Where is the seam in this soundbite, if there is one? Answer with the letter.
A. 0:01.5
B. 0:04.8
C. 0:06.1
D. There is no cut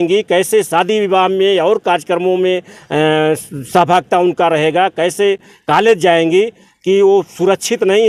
D